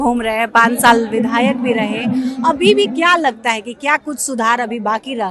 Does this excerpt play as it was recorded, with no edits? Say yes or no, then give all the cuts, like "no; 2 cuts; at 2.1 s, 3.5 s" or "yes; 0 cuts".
yes; 0 cuts